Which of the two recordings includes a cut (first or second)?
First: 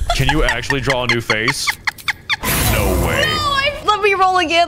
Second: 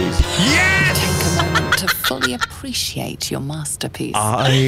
first